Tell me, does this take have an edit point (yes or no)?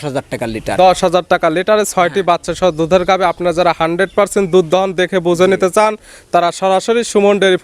no